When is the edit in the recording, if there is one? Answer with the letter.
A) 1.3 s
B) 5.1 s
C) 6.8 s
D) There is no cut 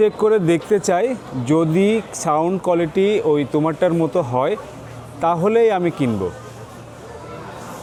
D